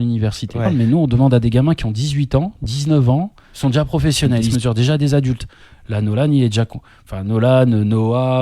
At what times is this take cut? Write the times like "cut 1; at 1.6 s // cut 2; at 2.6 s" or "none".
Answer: cut 1; at 0.8 s // cut 2; at 5.8 s